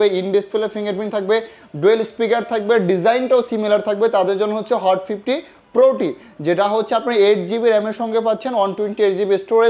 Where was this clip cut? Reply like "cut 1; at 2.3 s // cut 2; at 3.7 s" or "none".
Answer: none

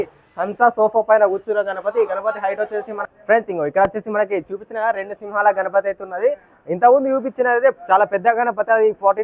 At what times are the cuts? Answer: cut 1; at 3.0 s

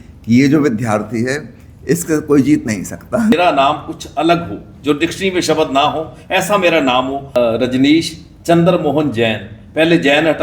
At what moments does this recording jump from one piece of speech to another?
cut 1; at 3.3 s // cut 2; at 7.4 s

